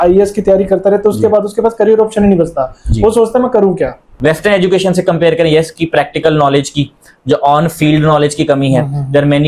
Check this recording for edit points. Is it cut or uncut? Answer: cut